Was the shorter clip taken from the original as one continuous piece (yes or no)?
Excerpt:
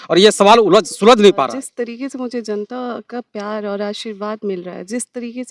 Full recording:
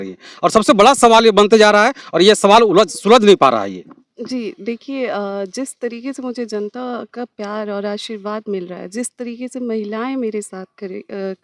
no